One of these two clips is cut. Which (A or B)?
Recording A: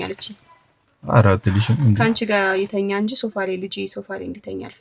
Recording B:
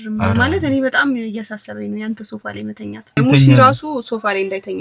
B